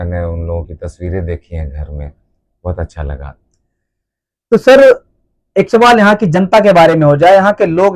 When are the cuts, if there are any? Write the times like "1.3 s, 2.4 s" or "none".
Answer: none